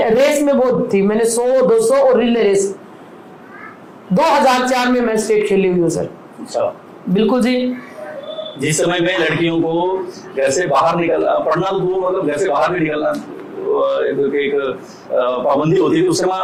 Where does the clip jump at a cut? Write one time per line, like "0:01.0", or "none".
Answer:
none